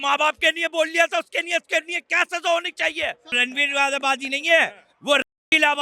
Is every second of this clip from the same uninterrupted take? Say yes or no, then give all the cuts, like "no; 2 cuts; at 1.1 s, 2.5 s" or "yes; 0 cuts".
no; 1 cut; at 3.3 s